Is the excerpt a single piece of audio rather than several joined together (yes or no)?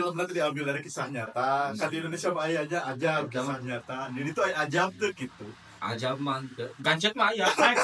yes